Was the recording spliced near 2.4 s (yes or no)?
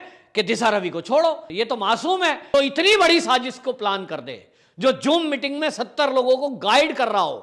yes